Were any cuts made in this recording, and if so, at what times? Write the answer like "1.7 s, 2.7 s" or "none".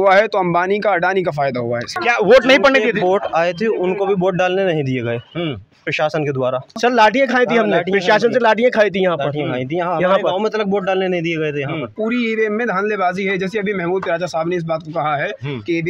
1.9 s, 6.7 s, 11.9 s